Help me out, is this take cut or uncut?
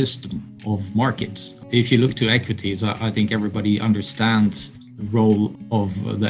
cut